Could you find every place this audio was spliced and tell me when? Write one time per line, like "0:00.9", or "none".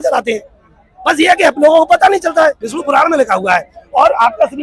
0:02.7